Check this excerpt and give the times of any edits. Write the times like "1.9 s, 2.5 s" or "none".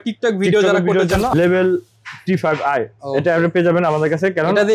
1.4 s